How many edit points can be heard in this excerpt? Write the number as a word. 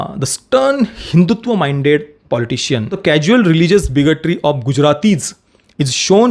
one